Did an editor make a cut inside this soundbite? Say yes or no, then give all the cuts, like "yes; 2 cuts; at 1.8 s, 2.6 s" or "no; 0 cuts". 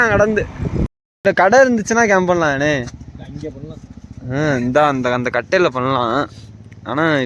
yes; 1 cut; at 1.2 s